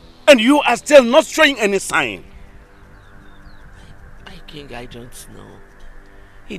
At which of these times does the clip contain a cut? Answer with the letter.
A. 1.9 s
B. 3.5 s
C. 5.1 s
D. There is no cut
D